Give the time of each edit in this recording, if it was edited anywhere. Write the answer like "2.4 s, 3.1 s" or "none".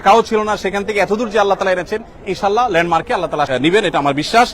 3.5 s

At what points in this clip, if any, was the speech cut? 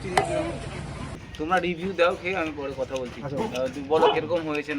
1.2 s

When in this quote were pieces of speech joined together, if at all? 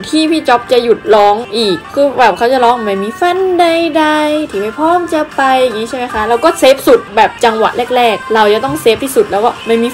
none

